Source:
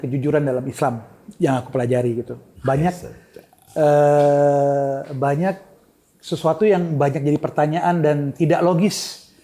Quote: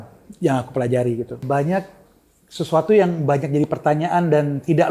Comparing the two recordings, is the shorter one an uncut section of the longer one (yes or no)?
no